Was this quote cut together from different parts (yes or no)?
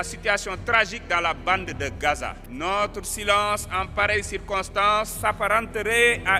yes